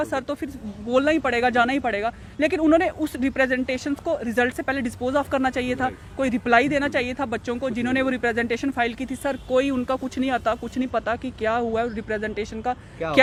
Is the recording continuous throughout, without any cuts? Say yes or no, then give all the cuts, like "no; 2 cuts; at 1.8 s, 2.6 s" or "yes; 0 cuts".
yes; 0 cuts